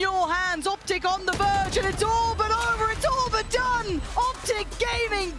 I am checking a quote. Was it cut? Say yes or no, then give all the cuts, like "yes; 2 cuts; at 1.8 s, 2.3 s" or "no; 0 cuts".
yes; 1 cut; at 4.1 s